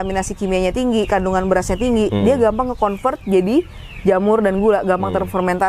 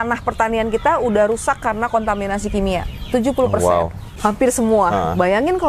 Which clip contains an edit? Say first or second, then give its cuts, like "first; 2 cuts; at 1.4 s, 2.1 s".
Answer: second; 1 cut; at 4.2 s